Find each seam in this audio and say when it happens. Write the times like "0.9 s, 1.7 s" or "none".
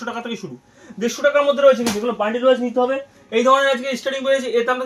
none